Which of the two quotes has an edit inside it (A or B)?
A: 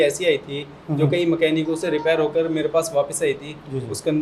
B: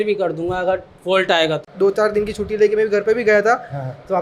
B